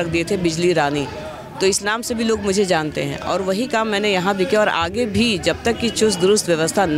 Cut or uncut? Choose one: uncut